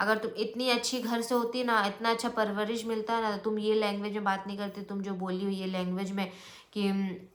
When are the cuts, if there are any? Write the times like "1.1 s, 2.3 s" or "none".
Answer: none